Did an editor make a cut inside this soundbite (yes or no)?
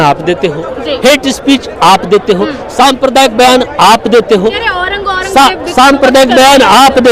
no